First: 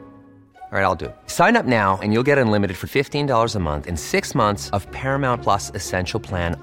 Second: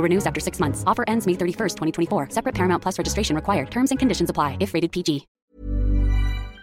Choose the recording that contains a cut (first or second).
second